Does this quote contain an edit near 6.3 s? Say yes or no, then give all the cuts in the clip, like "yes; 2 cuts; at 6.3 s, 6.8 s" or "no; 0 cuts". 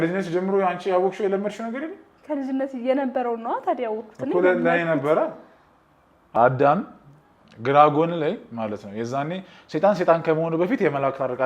yes; 1 cut; at 6.3 s